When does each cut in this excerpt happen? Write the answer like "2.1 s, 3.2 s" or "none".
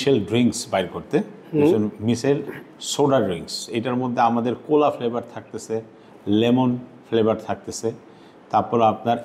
none